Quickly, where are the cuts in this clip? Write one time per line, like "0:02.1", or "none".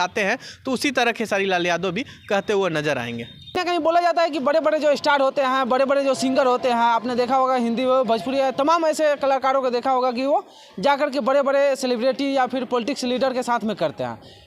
0:03.4